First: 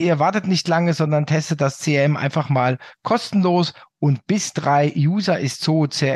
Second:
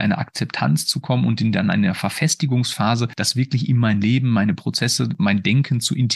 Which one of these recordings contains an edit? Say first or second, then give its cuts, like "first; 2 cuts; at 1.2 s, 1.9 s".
second; 2 cuts; at 3.2 s, 5.1 s